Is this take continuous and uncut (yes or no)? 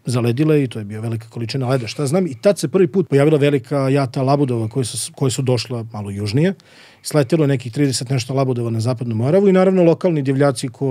no